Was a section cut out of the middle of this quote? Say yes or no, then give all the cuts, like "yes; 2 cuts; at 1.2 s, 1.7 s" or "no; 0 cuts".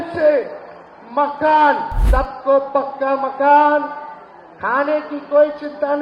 yes; 1 cut; at 2.0 s